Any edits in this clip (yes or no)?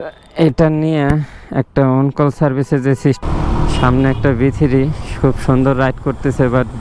yes